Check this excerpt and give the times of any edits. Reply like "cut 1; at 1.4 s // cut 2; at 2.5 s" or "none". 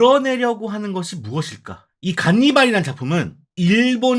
cut 1; at 1.9 s